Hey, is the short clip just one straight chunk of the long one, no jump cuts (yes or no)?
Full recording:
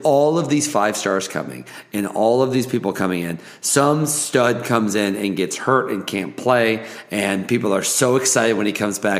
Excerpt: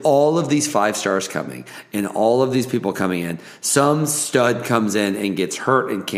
yes